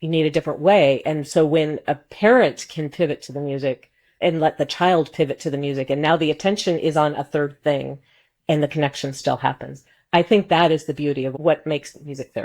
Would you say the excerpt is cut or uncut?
cut